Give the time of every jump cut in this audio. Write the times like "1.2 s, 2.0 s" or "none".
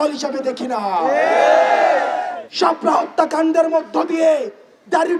2.4 s

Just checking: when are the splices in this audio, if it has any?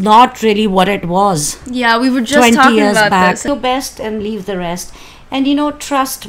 3.5 s

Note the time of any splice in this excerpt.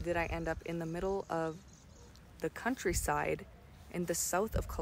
none

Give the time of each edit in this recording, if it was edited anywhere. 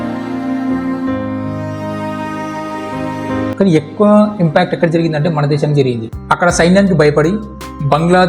6.1 s

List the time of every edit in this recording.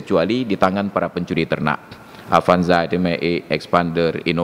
none

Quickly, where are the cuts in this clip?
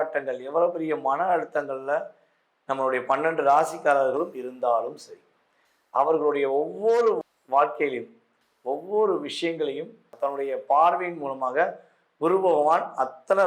10.1 s

